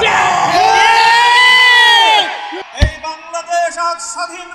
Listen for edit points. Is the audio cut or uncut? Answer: cut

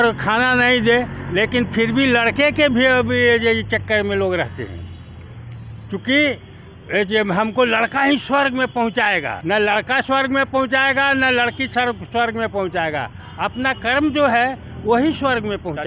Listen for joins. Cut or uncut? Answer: cut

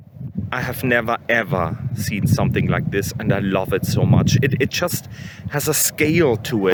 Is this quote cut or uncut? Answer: uncut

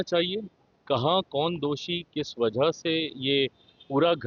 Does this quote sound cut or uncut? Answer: uncut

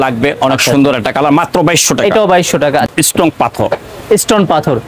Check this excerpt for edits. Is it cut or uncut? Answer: cut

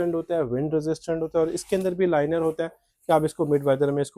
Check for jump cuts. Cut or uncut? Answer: uncut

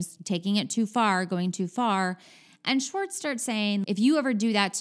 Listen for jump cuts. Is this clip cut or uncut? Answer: cut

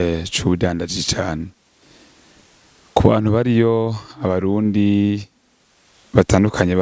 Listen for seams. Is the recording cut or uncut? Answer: uncut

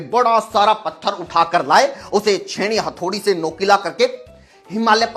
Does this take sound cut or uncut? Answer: uncut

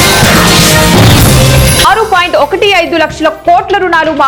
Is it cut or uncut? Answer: uncut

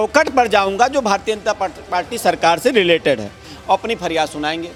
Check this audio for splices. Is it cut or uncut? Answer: uncut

